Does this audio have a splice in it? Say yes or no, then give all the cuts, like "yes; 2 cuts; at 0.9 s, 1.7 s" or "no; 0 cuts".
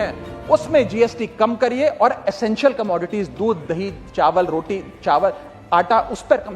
no; 0 cuts